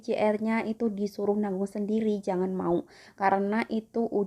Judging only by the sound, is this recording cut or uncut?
uncut